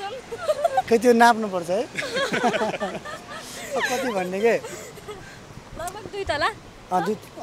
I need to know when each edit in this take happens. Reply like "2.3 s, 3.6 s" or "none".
none